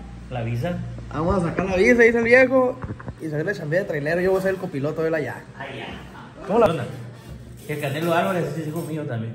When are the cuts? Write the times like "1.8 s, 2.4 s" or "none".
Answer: 6.7 s